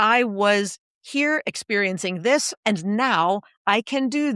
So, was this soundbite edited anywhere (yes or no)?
yes